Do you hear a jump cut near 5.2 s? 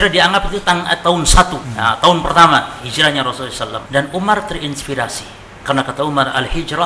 no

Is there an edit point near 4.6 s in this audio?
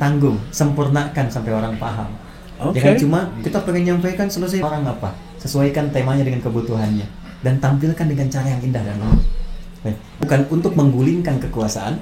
yes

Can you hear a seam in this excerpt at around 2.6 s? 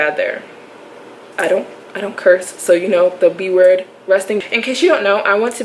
no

